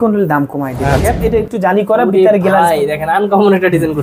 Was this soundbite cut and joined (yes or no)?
yes